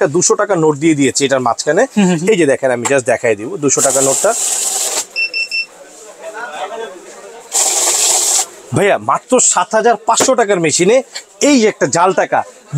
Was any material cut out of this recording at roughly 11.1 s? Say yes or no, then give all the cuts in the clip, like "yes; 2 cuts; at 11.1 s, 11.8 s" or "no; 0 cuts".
no; 0 cuts